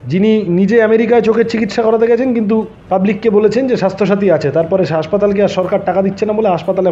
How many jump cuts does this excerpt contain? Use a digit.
1